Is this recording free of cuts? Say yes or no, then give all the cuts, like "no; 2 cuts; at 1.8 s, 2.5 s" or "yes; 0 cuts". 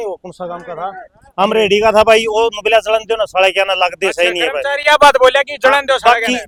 yes; 0 cuts